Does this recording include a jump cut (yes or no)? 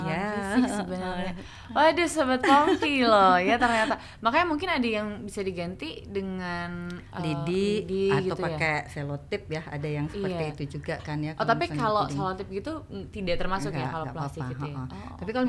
no